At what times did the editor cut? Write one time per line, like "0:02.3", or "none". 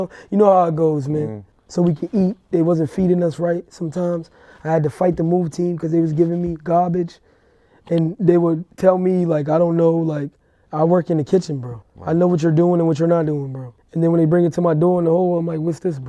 0:01.6